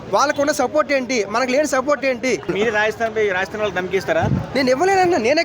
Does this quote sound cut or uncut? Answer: cut